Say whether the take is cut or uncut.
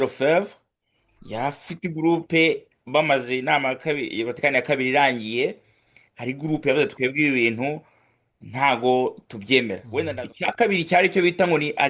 cut